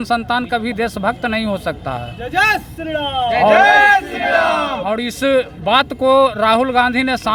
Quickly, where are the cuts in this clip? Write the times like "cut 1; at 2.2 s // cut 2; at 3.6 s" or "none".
none

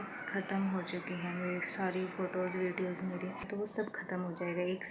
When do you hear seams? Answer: cut 1; at 3.5 s

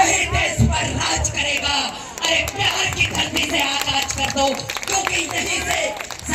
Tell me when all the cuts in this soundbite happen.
none

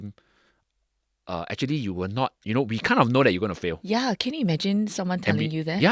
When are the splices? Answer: cut 1; at 3.8 s

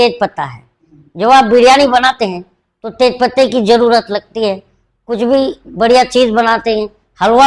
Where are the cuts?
none

